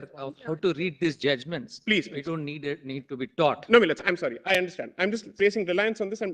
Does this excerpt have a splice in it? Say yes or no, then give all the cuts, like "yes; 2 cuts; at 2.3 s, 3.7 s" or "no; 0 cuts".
no; 0 cuts